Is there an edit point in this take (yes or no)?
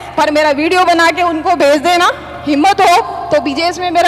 no